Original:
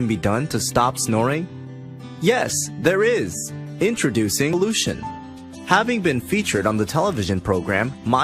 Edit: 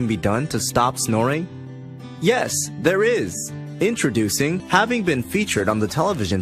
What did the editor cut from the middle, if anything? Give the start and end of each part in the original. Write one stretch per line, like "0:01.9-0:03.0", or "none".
0:04.5-0:05.5